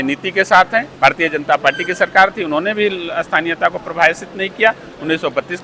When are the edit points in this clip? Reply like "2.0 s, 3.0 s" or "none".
0.9 s